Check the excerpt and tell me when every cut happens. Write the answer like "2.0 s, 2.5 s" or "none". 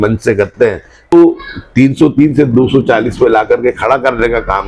1.1 s